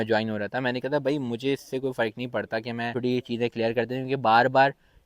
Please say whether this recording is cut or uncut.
cut